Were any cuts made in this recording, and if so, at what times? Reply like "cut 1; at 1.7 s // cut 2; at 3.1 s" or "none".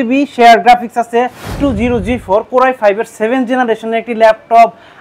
cut 1; at 1.4 s